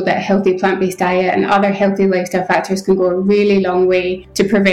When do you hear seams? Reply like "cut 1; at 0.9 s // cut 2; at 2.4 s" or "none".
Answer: none